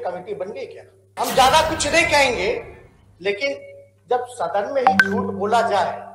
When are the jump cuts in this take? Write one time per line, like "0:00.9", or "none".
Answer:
0:00.9